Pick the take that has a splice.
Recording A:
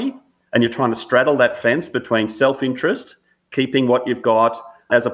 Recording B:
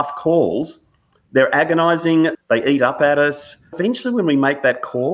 B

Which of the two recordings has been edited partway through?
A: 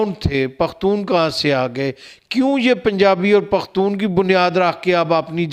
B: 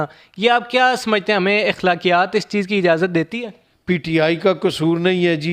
B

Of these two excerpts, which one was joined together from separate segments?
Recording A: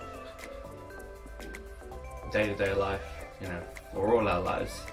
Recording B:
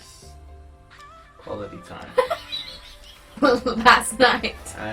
B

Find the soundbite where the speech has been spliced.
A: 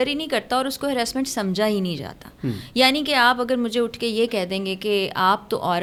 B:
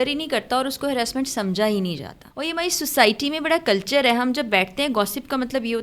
B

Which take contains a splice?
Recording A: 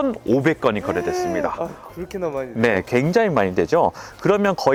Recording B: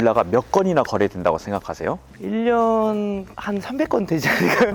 B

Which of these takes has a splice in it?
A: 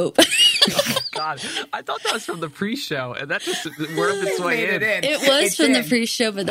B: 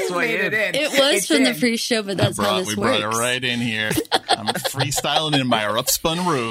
B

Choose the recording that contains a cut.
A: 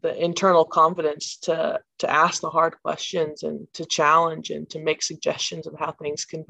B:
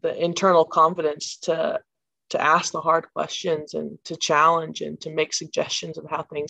A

